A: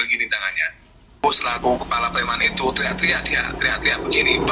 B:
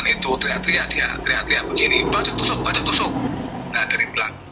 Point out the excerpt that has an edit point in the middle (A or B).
A